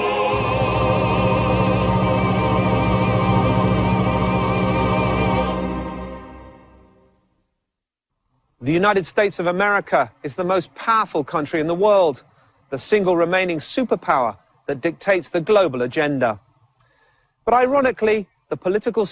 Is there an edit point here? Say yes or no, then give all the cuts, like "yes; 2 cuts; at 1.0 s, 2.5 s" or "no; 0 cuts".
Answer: no; 0 cuts